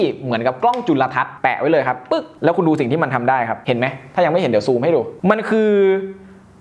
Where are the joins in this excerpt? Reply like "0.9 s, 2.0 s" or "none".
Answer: 1.3 s